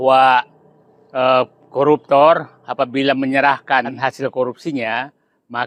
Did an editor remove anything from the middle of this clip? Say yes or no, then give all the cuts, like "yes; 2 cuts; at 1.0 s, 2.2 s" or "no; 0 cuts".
yes; 1 cut; at 4.0 s